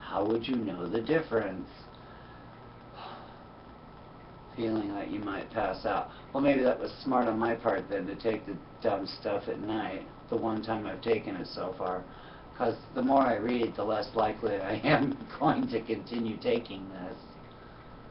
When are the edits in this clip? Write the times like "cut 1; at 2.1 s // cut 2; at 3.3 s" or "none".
cut 1; at 12.9 s